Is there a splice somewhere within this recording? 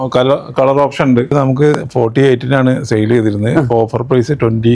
yes; 1 cut; at 1.3 s

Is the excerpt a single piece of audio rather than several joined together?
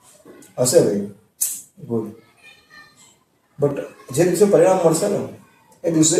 yes; 0 cuts

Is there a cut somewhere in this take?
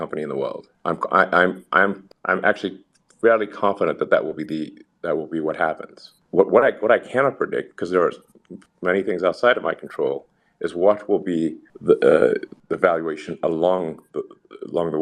no; 0 cuts

